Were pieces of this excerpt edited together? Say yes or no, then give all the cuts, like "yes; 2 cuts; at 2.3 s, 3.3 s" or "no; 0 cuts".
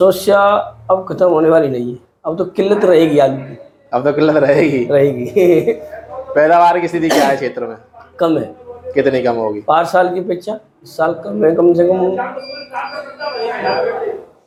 no; 0 cuts